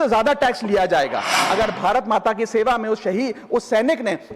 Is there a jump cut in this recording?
yes; 1 cut; at 1.4 s

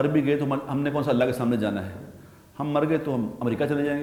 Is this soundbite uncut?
yes; 0 cuts

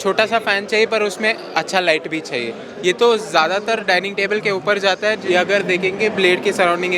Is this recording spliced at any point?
yes; 2 cuts; at 2.6 s, 5.2 s

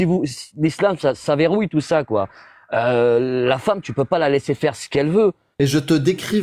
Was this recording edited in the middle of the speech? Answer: yes; 1 cut; at 5.4 s

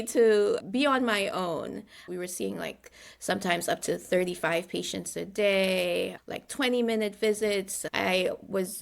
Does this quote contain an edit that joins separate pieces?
yes; 2 cuts; at 2.1 s, 7.8 s

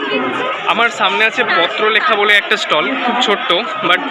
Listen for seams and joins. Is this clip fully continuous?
yes; 0 cuts

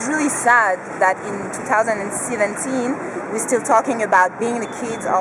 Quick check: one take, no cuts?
yes; 0 cuts

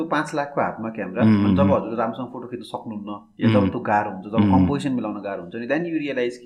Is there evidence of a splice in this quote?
no; 0 cuts

